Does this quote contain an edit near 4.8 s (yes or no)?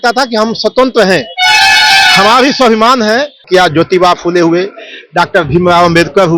no